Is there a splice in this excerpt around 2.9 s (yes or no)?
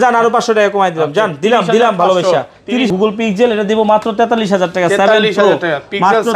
yes